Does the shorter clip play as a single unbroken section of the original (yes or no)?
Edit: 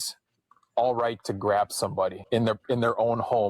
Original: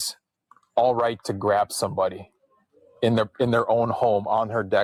no